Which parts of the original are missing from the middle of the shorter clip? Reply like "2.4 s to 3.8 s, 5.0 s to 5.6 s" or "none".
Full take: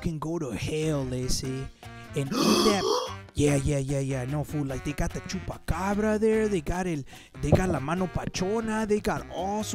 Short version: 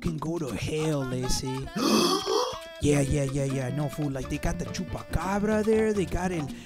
1.7 s to 2.2 s